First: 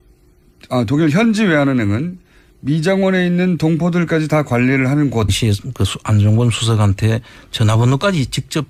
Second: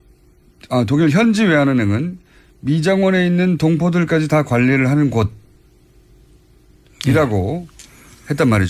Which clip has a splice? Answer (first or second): second